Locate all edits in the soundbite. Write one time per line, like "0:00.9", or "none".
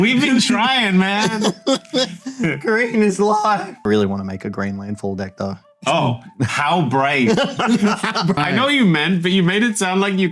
0:03.7
0:07.4
0:08.4